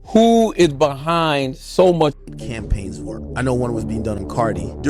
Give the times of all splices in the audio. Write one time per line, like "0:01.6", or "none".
0:02.2